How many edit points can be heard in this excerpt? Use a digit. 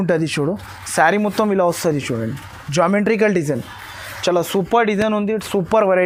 0